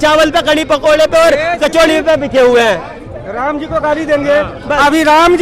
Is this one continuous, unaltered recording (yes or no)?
yes